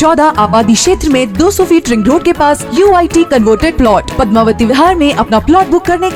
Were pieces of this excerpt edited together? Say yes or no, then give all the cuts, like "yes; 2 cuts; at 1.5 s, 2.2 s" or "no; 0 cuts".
no; 0 cuts